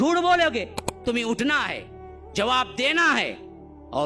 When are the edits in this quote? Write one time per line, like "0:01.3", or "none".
0:01.0